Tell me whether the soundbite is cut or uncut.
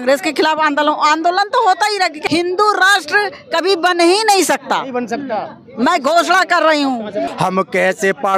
cut